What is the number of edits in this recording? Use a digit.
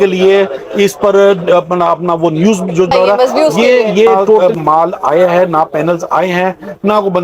2